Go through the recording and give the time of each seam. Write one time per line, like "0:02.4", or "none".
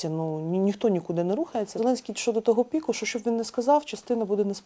0:01.8